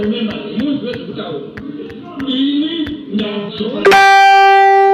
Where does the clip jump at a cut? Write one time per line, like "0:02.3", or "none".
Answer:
0:03.8

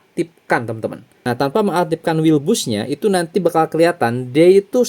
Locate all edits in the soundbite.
0:01.1

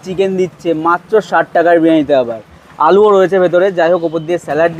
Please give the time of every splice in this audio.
none

